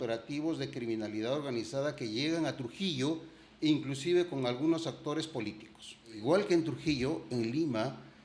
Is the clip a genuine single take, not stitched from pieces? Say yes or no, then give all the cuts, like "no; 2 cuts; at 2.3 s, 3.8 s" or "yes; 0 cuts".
no; 1 cut; at 6.2 s